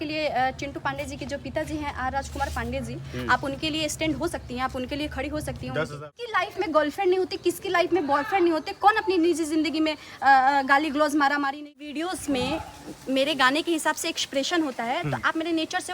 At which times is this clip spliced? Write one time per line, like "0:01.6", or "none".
0:06.1
0:11.6